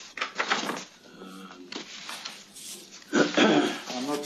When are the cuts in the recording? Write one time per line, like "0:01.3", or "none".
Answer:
0:00.9